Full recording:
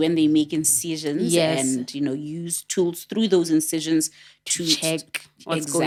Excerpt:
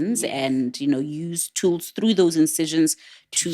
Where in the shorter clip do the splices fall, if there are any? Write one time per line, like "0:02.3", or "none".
none